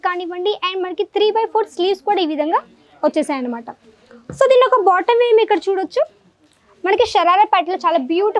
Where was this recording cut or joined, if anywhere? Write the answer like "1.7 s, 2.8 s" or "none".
none